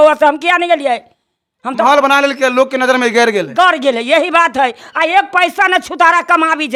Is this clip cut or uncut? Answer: uncut